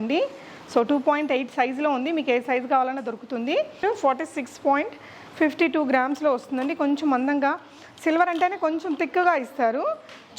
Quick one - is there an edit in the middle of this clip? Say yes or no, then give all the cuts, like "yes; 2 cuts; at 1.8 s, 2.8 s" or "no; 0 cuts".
yes; 1 cut; at 3.8 s